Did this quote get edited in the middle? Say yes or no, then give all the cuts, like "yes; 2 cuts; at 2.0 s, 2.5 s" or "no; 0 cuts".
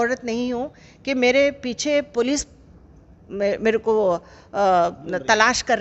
no; 0 cuts